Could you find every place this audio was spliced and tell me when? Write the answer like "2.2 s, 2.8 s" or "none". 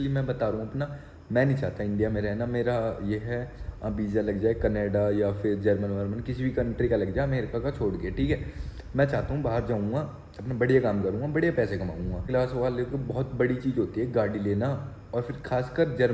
12.3 s